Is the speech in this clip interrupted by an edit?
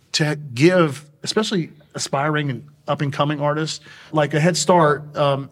yes; 1 cut; at 4.1 s

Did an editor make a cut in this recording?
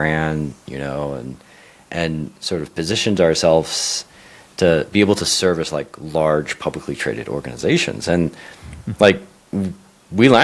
no; 0 cuts

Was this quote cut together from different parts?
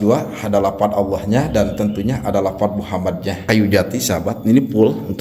yes; 1 cut; at 3.4 s

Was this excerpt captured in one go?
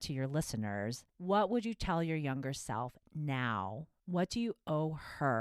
no; 2 cuts; at 1.1 s, 3.9 s

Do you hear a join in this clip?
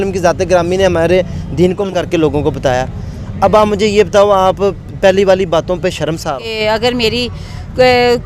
yes; 2 cuts; at 1.9 s, 6.5 s

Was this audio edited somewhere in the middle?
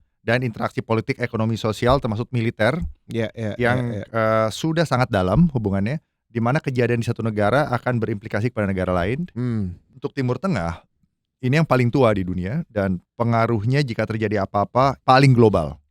yes; 3 cuts; at 9.8 s, 13.1 s, 15.0 s

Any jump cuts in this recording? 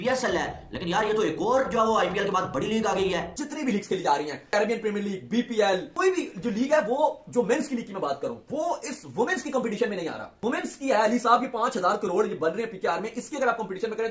yes; 3 cuts; at 3.3 s, 5.9 s, 10.4 s

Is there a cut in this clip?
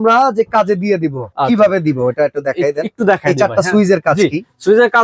no; 0 cuts

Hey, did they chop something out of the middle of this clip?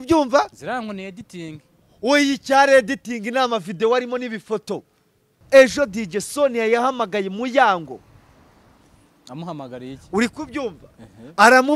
yes; 1 cut; at 5.4 s

